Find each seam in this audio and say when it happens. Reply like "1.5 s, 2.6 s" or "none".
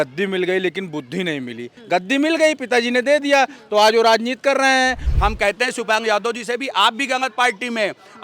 1.7 s, 5.1 s